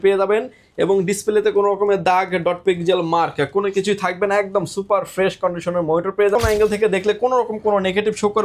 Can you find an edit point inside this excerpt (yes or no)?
yes